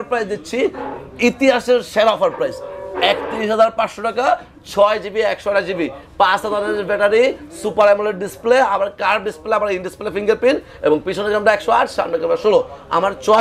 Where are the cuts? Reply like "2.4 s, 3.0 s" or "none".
none